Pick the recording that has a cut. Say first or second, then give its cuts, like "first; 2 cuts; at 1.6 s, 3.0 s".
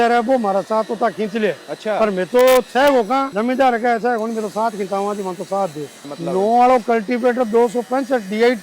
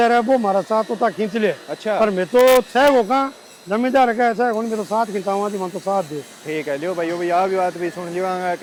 first; 2 cuts; at 3.3 s, 6.1 s